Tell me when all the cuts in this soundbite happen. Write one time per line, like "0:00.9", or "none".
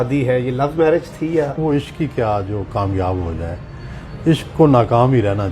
0:01.5